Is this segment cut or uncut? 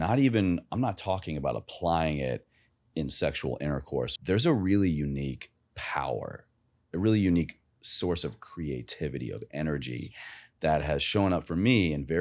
cut